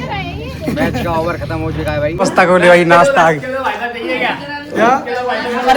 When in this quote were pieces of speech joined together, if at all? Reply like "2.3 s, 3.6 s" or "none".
2.1 s